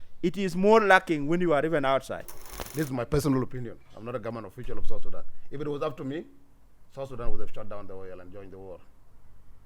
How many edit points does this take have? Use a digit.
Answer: 1